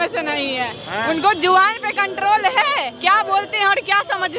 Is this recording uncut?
yes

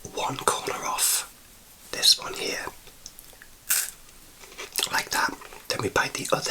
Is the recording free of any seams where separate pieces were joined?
no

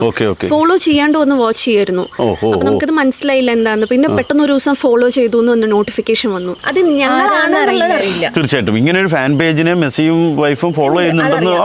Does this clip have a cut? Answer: yes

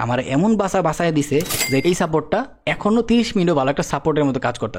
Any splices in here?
yes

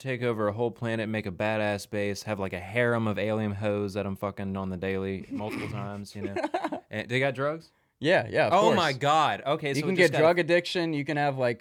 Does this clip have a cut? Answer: no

